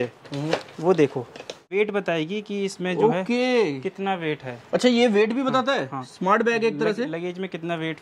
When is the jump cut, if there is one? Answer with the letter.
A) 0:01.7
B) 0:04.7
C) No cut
A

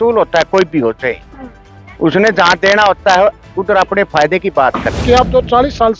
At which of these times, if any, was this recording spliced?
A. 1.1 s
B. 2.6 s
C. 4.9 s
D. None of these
C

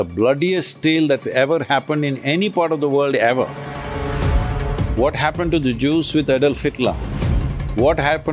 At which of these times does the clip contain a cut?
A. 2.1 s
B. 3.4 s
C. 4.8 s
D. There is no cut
D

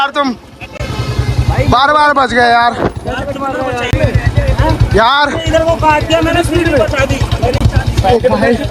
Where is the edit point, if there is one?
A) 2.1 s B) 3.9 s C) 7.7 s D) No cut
B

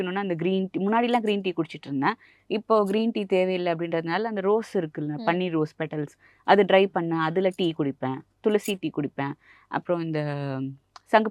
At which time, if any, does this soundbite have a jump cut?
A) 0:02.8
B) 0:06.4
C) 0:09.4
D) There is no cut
D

